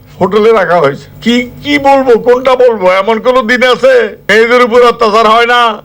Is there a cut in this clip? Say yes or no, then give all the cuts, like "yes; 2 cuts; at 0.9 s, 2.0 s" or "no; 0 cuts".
yes; 2 cuts; at 1.1 s, 4.2 s